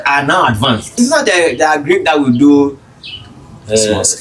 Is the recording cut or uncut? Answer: cut